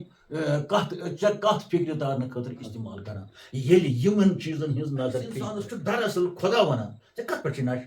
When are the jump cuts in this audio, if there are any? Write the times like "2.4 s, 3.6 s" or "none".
5.6 s

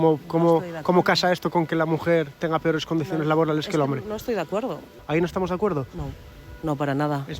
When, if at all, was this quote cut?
4.9 s

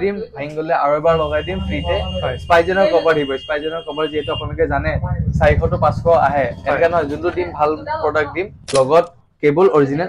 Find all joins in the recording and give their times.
8.6 s

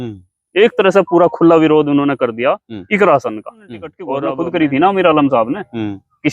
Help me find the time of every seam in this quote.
4.1 s

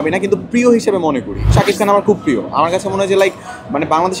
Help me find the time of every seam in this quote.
1.5 s

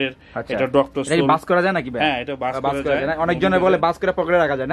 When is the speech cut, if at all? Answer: none

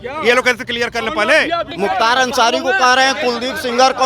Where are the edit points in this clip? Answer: 1.7 s

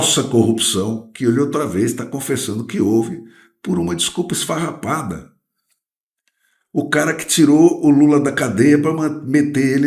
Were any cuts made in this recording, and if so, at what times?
none

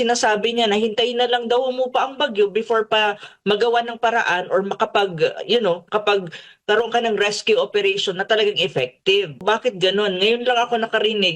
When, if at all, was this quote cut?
9.4 s

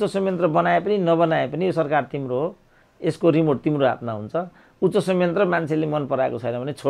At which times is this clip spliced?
none

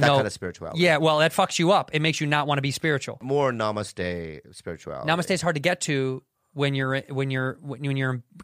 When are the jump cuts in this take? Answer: 3.2 s

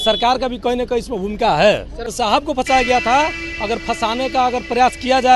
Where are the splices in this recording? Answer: 2.1 s

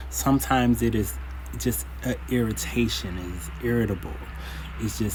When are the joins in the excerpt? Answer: none

